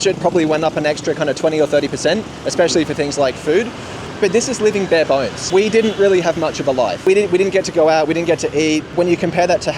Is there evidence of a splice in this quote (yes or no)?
yes